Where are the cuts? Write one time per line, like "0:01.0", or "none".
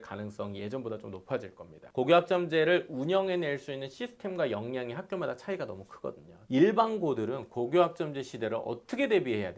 0:01.9
0:06.3